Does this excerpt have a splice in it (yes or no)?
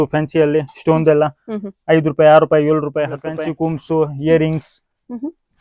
yes